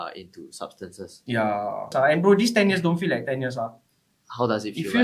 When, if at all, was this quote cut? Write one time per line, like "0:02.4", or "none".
0:01.9